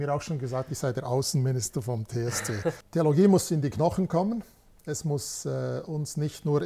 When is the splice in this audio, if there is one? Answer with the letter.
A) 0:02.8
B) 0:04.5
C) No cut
A